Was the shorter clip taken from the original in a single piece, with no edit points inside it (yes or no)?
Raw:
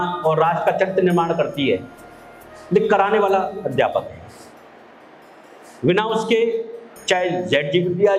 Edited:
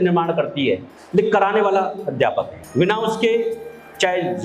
no